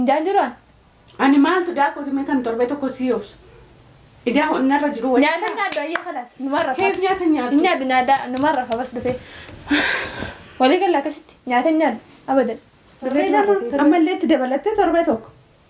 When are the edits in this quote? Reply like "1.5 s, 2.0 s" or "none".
13.3 s

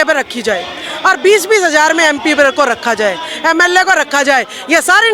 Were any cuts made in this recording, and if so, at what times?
none

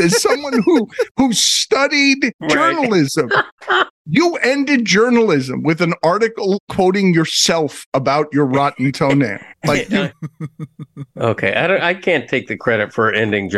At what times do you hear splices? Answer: 2.4 s, 4.0 s

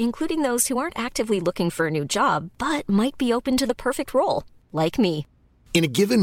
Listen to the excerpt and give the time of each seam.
none

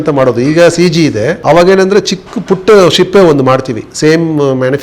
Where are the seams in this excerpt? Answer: 1.3 s

